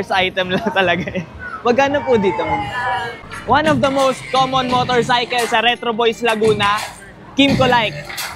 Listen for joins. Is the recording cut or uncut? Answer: cut